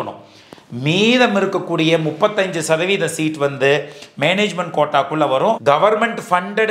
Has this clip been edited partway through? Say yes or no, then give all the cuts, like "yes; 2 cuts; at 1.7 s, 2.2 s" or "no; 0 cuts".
yes; 1 cut; at 5.6 s